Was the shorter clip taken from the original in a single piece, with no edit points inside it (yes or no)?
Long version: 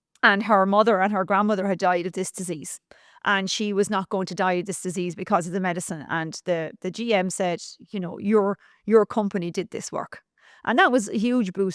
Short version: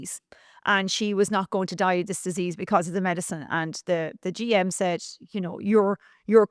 yes